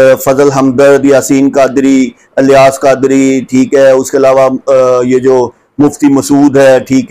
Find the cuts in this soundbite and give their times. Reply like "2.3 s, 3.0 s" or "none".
none

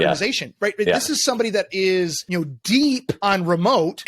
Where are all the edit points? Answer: 2.2 s, 3.1 s

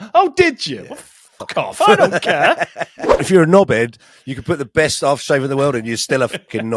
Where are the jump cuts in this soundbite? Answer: 3.1 s

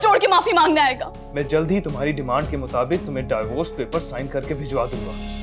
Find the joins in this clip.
1.2 s

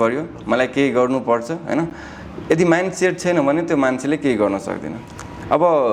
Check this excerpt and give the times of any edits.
none

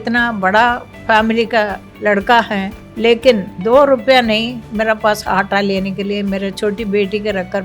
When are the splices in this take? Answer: 0.9 s, 1.8 s, 2.8 s, 3.5 s

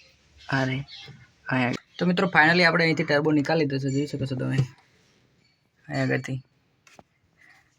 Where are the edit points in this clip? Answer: 1.8 s

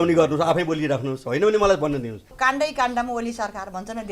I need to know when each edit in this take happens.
2.3 s

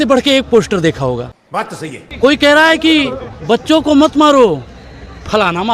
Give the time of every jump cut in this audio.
none

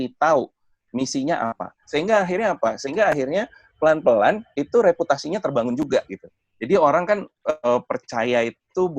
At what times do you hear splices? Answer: 1.7 s

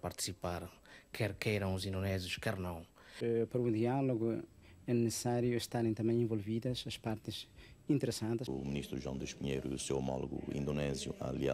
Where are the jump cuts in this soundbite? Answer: 3.1 s, 8.5 s

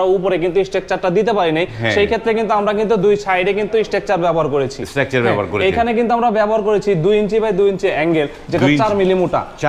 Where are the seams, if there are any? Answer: none

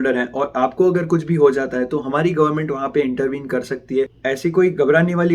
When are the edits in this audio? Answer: 4.2 s

